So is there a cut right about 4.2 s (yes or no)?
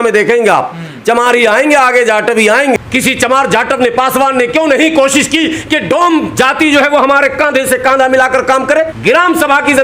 no